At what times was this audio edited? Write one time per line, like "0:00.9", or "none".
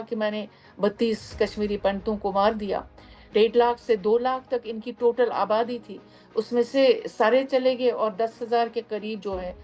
0:03.2